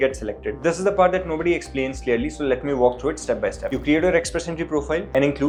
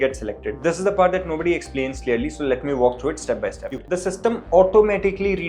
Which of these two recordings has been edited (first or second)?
second